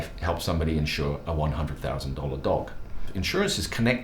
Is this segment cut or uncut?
cut